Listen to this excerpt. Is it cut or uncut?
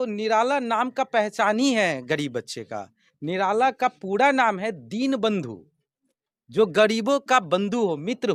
uncut